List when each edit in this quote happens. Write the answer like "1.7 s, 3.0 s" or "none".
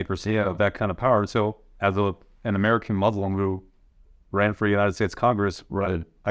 none